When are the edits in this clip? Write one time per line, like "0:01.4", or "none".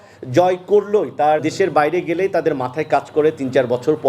0:01.5